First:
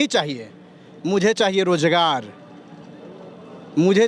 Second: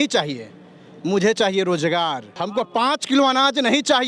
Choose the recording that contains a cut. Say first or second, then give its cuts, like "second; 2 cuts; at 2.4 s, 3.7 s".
second; 1 cut; at 2.3 s